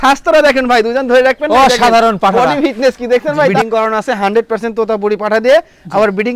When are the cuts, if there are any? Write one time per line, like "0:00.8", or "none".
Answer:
0:03.6